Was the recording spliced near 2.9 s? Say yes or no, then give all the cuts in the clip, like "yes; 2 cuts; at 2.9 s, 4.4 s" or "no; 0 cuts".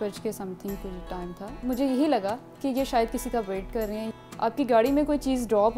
no; 2 cuts; at 1.6 s, 4.1 s